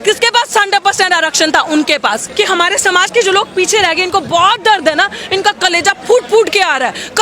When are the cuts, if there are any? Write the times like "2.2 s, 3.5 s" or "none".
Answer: 2.2 s